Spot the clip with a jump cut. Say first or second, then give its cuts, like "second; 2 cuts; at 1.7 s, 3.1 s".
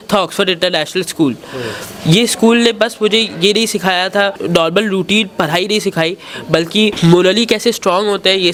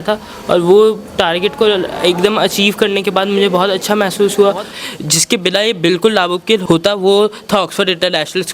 second; 1 cut; at 4.7 s